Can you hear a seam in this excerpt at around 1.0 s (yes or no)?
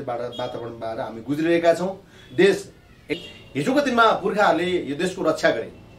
no